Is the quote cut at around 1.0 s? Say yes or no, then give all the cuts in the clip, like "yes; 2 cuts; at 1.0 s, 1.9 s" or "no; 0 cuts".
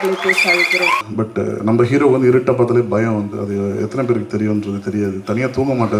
yes; 1 cut; at 1.0 s